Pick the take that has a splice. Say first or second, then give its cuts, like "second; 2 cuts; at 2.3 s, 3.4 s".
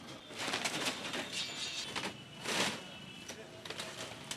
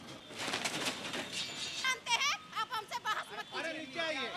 second; 1 cut; at 1.9 s